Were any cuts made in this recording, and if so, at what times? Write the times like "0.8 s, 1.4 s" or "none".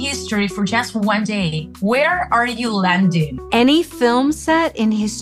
none